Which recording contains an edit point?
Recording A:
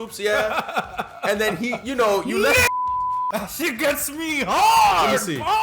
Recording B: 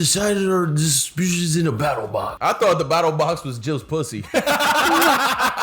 A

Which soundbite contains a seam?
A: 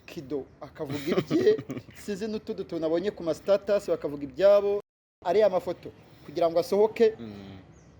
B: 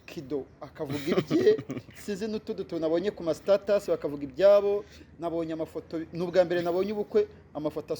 A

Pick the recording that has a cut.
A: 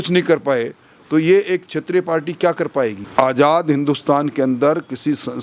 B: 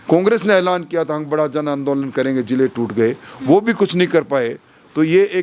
A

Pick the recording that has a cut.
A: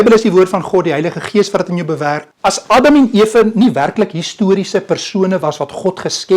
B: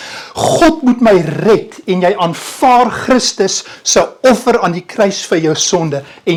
A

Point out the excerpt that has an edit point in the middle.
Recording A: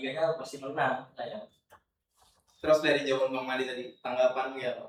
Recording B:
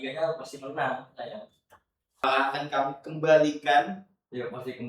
B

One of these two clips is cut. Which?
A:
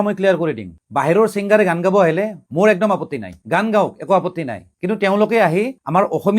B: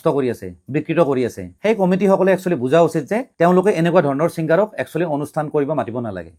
A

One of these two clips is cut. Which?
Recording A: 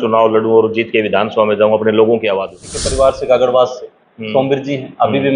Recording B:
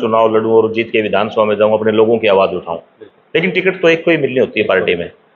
A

